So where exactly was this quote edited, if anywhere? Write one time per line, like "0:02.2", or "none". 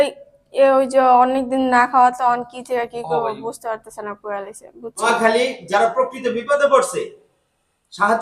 0:05.1